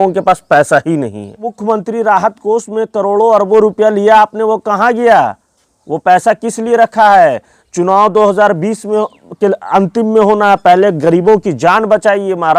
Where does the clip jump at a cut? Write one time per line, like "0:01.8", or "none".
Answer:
0:01.5